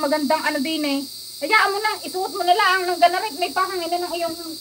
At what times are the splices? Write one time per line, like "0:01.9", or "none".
none

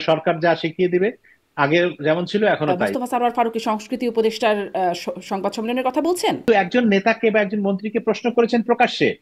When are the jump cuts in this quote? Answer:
0:02.9
0:06.4

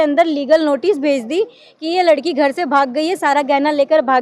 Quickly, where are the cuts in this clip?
none

